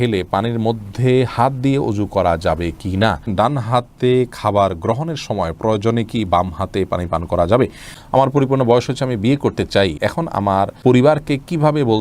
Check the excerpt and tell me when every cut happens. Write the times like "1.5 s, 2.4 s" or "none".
3.3 s, 7.9 s, 10.4 s